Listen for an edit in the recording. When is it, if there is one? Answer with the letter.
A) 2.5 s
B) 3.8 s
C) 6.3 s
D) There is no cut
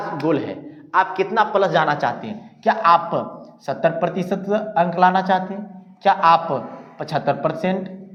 D